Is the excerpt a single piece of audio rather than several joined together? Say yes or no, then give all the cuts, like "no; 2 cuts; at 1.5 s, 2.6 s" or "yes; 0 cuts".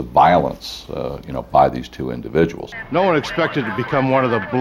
no; 1 cut; at 2.7 s